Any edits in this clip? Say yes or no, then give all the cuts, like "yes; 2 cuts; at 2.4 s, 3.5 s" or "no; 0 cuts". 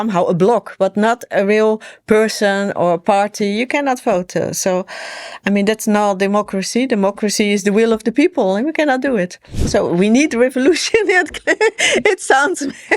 yes; 1 cut; at 9.7 s